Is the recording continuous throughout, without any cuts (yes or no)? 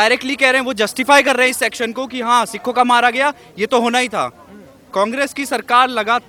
yes